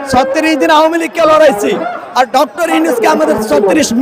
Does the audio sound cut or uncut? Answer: uncut